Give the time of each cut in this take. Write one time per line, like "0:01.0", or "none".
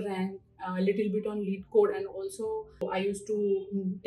0:02.8